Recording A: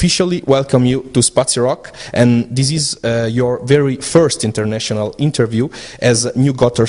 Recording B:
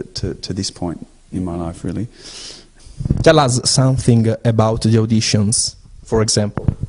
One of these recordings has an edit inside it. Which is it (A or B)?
B